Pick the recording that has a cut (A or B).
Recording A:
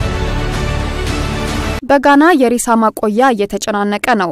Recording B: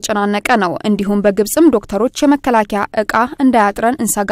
A